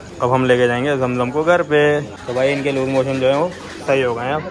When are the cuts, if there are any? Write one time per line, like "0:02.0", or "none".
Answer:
0:02.1